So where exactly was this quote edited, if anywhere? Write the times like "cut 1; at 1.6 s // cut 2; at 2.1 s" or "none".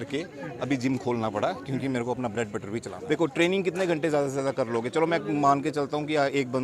cut 1; at 2.9 s